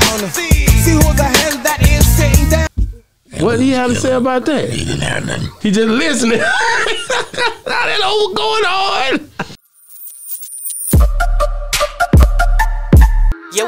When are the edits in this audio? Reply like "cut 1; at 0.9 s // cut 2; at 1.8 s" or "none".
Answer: cut 1; at 9.5 s